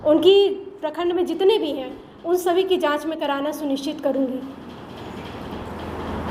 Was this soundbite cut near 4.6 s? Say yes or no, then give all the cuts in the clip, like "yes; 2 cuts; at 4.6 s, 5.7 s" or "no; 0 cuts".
no; 0 cuts